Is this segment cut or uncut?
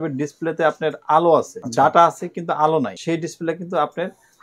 cut